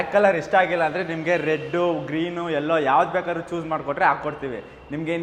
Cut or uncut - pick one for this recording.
uncut